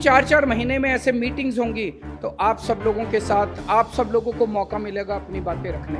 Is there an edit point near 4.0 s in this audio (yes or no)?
no